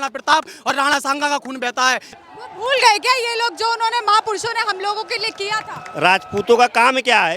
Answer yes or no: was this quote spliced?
yes